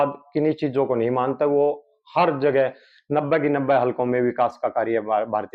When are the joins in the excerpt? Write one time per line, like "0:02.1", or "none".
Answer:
none